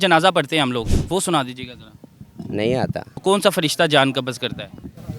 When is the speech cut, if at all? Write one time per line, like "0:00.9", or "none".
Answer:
0:01.0
0:03.1

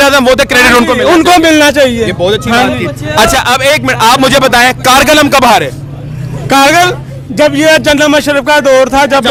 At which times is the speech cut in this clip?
none

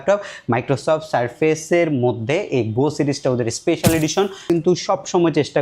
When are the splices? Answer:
0:04.4

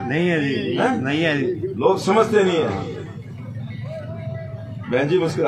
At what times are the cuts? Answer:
none

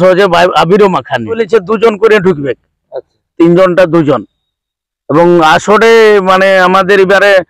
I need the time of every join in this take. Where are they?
0:01.4

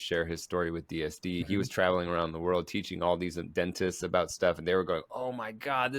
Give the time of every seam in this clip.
0:01.4

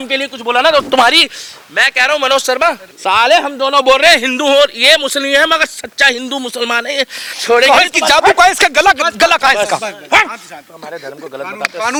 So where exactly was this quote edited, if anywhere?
none

